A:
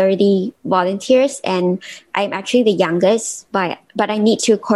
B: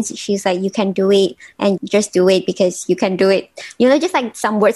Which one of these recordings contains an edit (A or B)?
B